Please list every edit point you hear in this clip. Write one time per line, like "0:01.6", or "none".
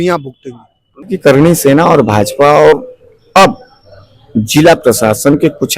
0:01.1